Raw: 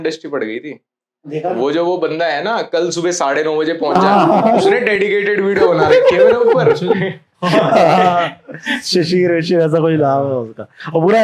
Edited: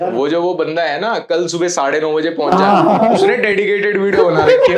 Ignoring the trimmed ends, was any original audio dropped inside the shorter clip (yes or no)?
no